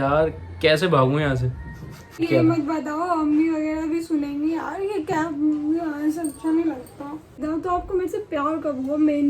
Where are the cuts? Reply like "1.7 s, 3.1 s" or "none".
2.2 s, 7.4 s